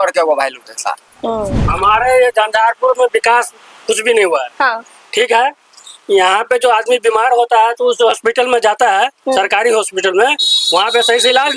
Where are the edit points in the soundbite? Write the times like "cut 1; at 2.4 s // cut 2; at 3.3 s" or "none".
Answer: cut 1; at 1.6 s